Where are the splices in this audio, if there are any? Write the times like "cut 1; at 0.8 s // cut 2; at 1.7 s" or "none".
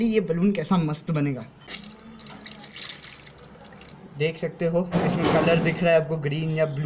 cut 1; at 1.7 s // cut 2; at 3.9 s